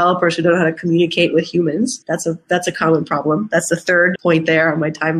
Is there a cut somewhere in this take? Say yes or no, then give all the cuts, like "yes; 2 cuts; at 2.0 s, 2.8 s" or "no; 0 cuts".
yes; 2 cuts; at 2.0 s, 4.1 s